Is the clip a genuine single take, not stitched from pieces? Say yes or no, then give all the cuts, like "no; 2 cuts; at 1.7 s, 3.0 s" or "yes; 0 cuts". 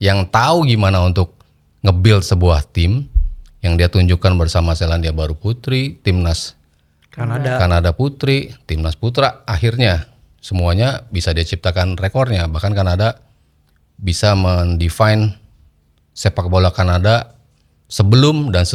yes; 0 cuts